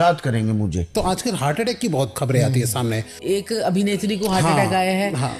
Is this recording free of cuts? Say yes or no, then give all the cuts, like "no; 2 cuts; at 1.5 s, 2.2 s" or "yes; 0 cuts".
no; 3 cuts; at 0.9 s, 2.1 s, 3.2 s